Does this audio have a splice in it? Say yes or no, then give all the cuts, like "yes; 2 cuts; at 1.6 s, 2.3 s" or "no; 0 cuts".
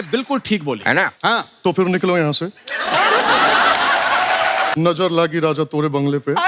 yes; 1 cut; at 4.7 s